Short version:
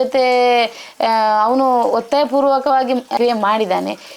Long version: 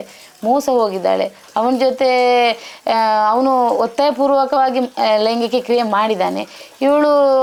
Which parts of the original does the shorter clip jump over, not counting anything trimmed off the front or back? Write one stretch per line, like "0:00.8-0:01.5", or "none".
0:05.0-0:05.6